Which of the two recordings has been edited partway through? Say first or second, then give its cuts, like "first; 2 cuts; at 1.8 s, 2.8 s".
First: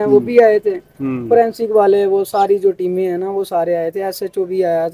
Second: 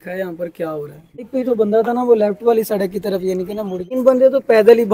second; 2 cuts; at 1.3 s, 3.9 s